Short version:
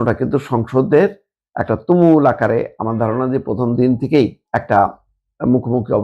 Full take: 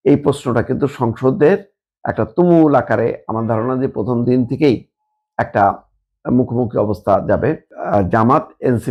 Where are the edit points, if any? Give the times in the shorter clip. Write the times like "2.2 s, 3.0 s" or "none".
4.4 s